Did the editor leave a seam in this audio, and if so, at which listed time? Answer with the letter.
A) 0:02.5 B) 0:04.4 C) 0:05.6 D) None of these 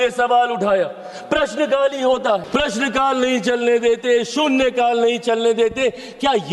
A